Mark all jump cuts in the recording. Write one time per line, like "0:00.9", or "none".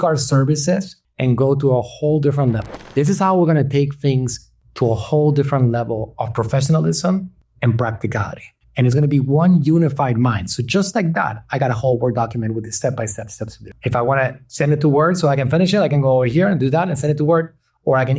none